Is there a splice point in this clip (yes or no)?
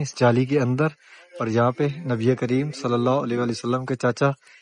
no